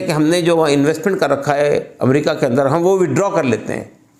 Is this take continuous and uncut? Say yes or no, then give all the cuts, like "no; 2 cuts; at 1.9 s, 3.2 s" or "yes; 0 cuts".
yes; 0 cuts